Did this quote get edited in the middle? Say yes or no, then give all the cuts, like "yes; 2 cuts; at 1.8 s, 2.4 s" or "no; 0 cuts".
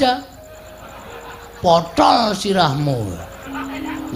no; 0 cuts